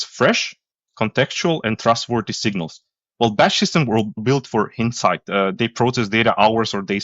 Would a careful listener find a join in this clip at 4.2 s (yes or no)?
yes